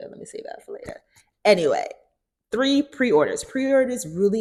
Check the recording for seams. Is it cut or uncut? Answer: uncut